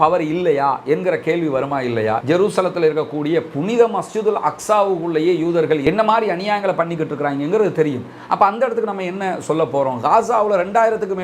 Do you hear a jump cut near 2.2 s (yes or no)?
yes